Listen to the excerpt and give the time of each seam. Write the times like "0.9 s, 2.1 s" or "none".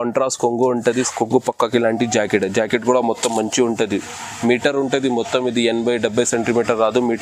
1.0 s